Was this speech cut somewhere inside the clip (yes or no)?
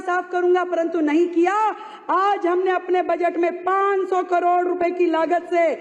no